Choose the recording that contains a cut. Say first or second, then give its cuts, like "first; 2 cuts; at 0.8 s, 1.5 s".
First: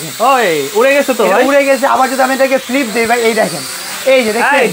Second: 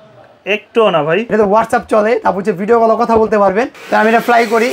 second; 2 cuts; at 1.3 s, 3.8 s